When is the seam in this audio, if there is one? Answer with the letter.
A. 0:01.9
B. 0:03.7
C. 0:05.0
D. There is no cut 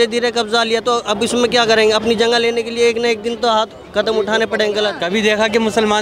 C